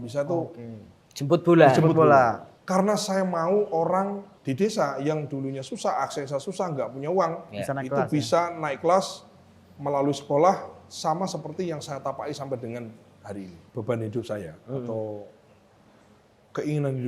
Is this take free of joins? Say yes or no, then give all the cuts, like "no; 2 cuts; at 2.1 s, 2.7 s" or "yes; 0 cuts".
no; 3 cuts; at 2.5 s, 4.3 s, 13.6 s